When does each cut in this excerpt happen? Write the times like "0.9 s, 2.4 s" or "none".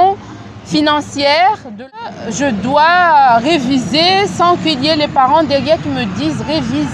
1.9 s